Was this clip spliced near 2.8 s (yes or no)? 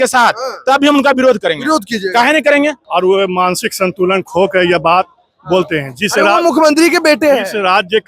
yes